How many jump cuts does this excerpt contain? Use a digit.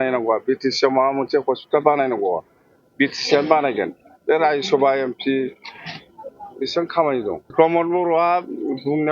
1